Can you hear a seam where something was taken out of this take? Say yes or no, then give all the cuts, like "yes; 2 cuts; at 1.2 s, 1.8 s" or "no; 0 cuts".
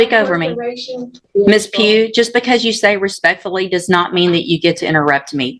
yes; 1 cut; at 1.2 s